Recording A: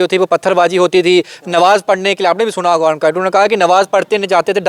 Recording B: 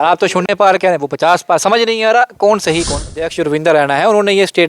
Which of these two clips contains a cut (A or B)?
B